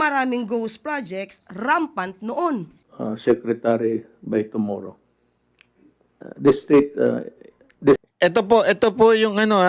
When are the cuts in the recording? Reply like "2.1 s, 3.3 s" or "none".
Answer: 2.8 s